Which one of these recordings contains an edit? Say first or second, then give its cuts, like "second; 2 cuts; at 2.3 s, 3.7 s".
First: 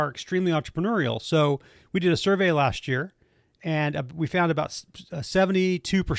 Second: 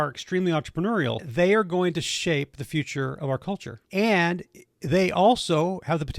second; 2 cuts; at 1.2 s, 3.7 s